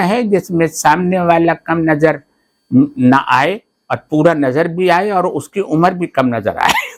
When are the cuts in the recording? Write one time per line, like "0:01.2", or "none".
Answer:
none